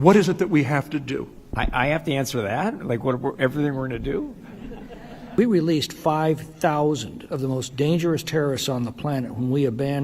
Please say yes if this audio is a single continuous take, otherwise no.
no